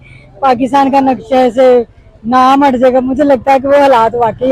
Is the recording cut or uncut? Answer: uncut